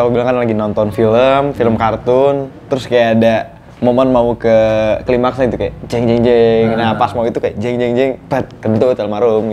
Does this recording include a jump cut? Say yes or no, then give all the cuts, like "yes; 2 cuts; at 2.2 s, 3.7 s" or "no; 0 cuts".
no; 0 cuts